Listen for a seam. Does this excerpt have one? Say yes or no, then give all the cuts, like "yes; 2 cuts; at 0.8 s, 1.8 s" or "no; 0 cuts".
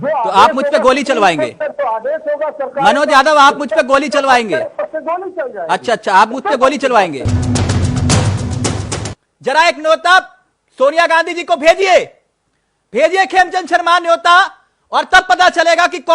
yes; 2 cuts; at 7.2 s, 9.0 s